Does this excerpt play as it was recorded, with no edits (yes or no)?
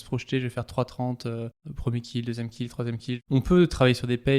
no